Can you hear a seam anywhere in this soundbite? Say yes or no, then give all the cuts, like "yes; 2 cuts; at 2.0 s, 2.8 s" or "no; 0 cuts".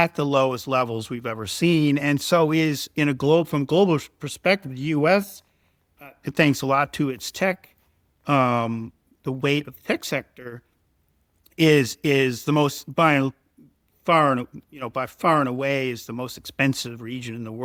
no; 0 cuts